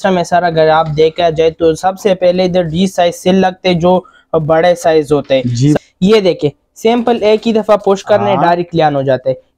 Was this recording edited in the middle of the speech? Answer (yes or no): yes